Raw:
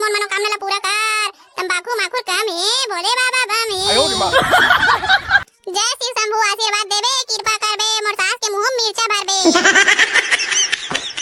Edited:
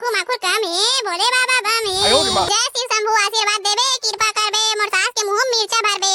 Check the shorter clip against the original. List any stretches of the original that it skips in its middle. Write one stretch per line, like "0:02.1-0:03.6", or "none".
0:04.3-0:05.7